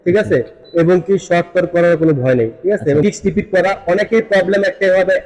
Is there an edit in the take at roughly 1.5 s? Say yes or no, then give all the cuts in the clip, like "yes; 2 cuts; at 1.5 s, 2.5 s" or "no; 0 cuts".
no; 1 cut; at 3.0 s